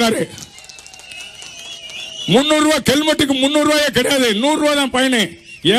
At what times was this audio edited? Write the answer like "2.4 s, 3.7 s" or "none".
none